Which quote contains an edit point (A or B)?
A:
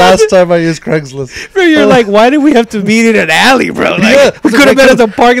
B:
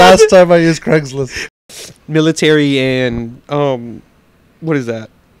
B